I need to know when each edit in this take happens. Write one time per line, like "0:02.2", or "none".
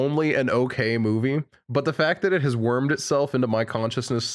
none

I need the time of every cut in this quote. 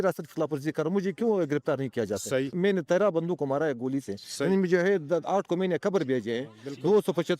0:02.5

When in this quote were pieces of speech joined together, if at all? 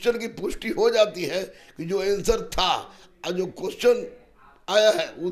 none

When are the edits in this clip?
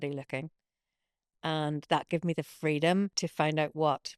0:03.2

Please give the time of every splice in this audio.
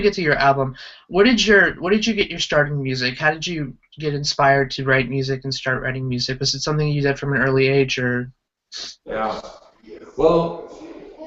0:02.9

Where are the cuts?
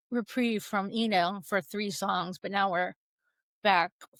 none

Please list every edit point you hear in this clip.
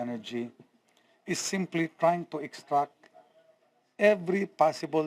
0:00.9

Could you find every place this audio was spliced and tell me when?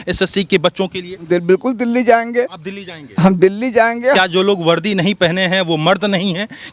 0:01.2
0:04.2

